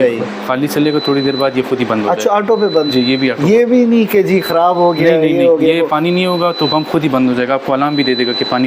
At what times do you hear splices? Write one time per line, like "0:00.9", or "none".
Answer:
none